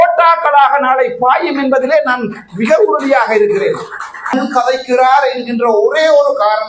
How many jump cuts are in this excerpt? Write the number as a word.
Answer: one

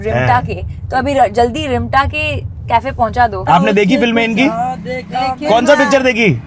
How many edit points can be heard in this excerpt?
one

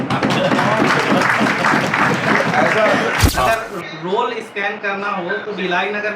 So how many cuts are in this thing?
one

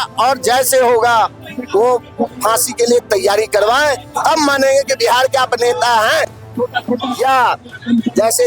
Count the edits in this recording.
zero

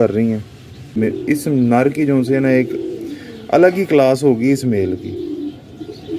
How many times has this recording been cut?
one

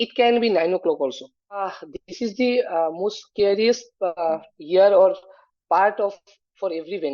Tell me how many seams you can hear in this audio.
one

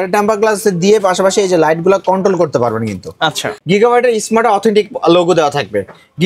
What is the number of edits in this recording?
one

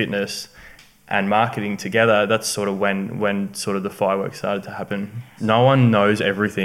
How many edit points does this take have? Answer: one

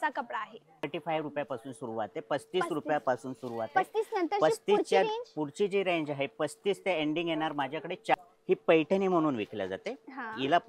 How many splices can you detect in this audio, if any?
two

